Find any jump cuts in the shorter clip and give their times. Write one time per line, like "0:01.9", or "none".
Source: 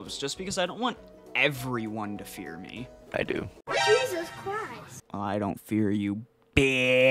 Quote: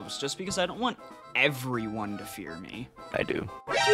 none